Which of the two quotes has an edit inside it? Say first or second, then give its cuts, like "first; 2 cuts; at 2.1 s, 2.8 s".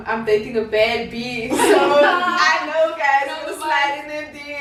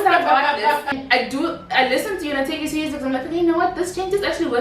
second; 1 cut; at 0.9 s